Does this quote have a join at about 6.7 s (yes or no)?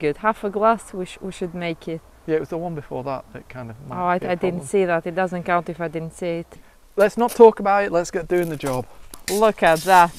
yes